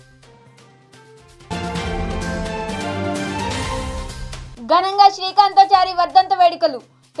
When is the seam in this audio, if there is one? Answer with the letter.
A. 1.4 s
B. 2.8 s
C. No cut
A